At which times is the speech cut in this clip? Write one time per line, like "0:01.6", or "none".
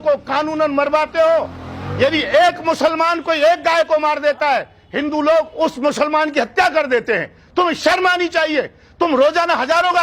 none